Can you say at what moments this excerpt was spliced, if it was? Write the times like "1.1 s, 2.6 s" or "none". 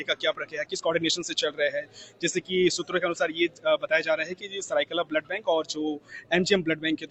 none